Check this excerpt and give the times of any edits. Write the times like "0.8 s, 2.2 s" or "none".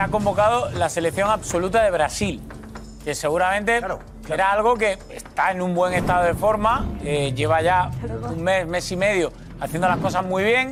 none